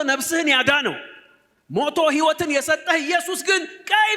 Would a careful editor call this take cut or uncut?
uncut